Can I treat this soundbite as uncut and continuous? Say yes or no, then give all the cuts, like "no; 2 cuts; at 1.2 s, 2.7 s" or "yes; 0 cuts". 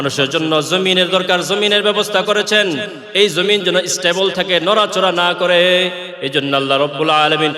yes; 0 cuts